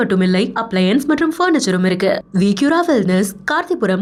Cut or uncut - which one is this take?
uncut